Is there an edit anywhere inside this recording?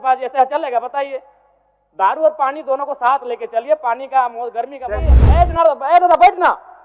yes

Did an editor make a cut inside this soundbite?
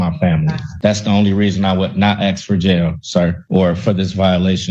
no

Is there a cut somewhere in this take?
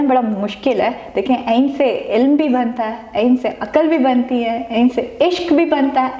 no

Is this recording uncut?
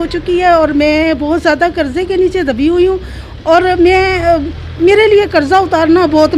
yes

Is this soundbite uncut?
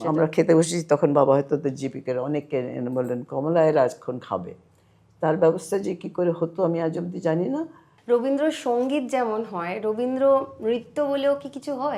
no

